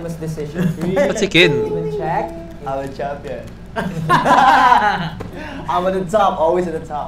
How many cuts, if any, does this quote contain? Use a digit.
1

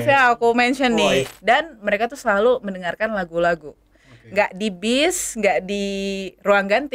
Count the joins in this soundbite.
1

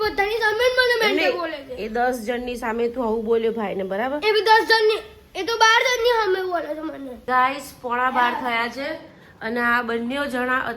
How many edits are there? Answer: 1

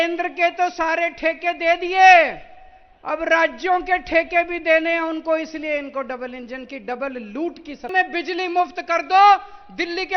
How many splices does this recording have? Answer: 1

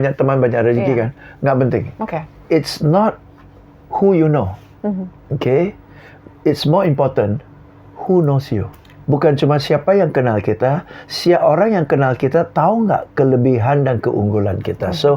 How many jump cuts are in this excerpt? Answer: 1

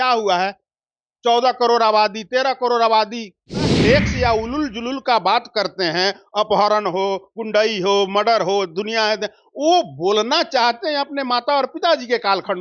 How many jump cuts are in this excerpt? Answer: 1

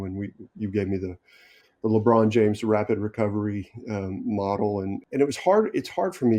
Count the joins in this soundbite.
1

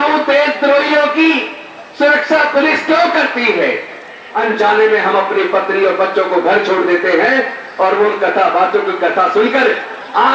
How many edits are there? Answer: 1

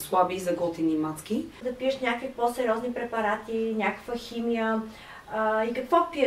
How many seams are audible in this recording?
1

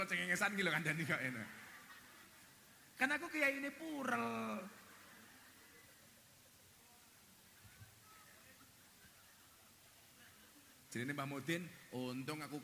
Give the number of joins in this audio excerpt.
0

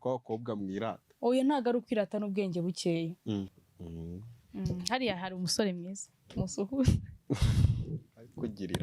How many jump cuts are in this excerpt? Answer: 1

